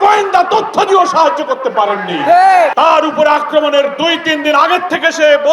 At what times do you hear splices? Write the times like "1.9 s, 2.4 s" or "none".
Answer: 2.7 s